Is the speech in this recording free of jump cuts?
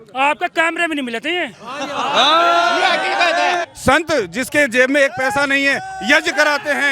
no; 1 cut; at 3.7 s

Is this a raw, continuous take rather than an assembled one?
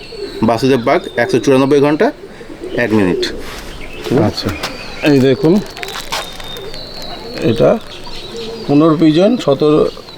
yes; 0 cuts

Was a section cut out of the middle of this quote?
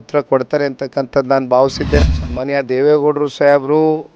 yes; 1 cut; at 2.0 s

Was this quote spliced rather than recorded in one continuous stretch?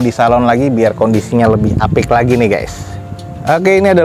no; 0 cuts

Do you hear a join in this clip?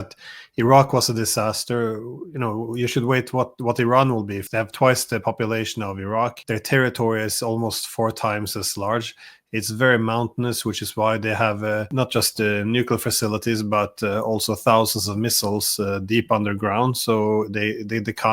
yes; 3 cuts; at 4.4 s, 6.4 s, 11.9 s

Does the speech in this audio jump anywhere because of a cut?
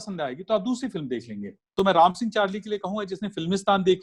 yes; 1 cut; at 1.6 s

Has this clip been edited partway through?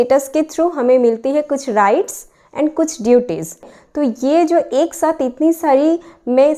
yes; 1 cut; at 3.8 s

